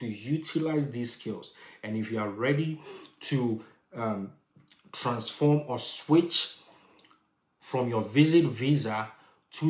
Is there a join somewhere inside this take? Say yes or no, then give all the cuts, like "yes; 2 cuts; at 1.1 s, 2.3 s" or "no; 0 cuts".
no; 0 cuts